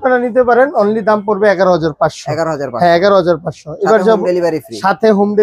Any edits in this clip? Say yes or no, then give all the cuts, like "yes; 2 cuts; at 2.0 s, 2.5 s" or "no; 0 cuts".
no; 0 cuts